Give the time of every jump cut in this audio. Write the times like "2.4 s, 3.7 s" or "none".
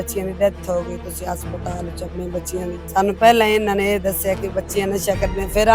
2.8 s